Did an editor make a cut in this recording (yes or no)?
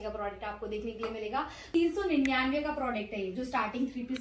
yes